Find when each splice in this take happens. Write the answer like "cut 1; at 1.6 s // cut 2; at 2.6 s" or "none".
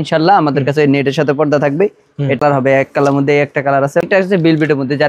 cut 1; at 2.4 s // cut 2; at 4.0 s